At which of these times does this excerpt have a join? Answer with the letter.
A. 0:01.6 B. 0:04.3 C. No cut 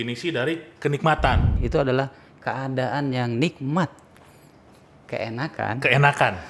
A